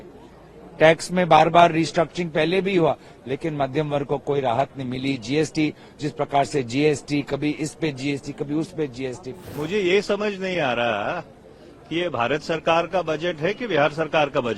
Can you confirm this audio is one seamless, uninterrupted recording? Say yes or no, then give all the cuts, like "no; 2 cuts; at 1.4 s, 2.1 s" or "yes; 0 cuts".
no; 1 cut; at 9.4 s